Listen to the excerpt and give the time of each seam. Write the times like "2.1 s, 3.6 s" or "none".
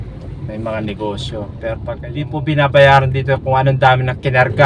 2.1 s